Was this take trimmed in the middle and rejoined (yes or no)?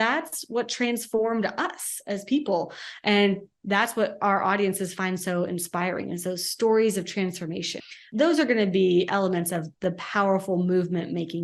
yes